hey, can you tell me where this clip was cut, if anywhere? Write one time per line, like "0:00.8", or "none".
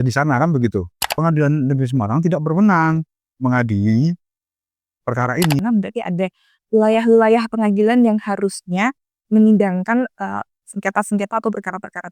0:01.0
0:05.6